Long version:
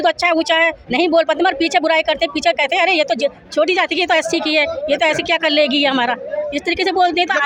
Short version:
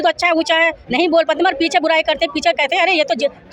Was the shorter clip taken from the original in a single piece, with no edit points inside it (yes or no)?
yes